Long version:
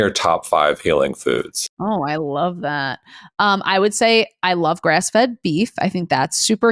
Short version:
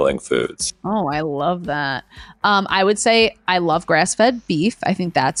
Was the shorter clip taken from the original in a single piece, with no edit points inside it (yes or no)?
yes